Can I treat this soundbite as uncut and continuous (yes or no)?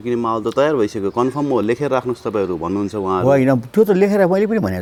yes